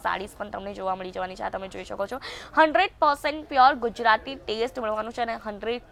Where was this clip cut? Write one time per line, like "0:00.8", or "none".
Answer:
none